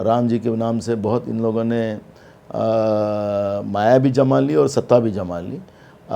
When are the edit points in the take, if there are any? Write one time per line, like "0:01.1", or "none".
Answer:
none